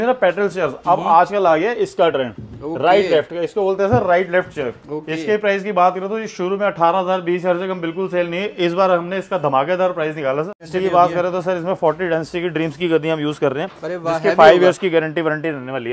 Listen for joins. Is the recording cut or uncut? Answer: cut